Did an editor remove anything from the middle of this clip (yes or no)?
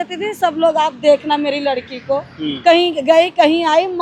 no